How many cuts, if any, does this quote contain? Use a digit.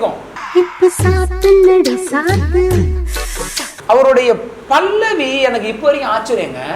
0